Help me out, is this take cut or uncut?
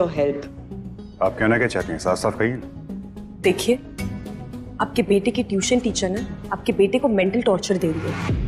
uncut